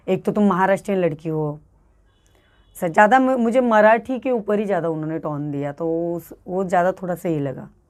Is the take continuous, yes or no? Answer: yes